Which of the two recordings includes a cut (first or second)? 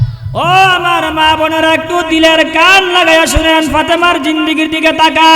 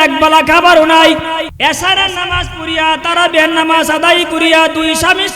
second